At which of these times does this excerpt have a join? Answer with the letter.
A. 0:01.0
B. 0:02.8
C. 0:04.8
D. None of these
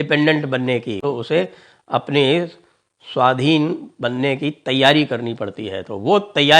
A